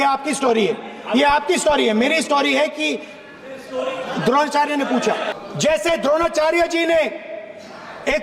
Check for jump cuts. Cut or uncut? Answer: cut